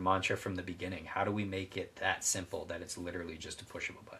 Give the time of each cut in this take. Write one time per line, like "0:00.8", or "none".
none